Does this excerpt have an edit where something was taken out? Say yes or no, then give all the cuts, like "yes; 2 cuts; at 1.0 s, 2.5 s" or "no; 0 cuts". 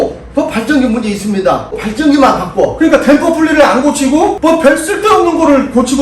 yes; 1 cut; at 2.0 s